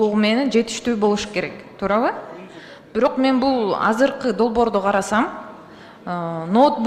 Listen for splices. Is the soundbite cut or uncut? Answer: uncut